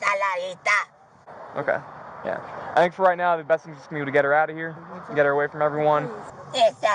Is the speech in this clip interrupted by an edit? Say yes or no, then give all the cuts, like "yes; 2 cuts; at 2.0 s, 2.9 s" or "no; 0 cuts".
no; 0 cuts